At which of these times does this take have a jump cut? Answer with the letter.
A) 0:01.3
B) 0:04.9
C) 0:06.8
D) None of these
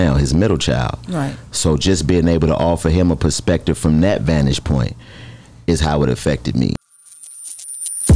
C